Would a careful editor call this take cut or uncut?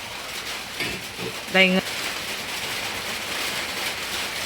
cut